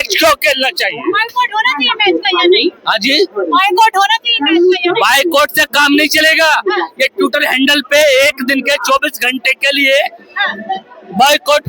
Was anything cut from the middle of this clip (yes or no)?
no